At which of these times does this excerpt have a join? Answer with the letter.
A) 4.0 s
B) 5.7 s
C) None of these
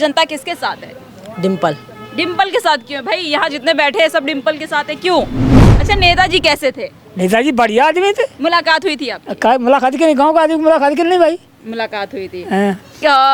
B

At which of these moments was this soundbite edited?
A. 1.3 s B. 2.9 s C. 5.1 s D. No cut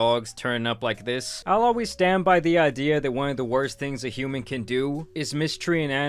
A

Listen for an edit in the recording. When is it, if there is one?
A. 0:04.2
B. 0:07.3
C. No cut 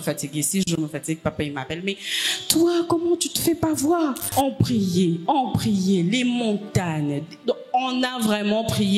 A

